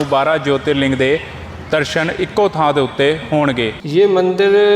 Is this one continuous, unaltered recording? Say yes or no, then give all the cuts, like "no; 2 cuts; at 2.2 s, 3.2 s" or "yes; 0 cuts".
no; 1 cut; at 3.8 s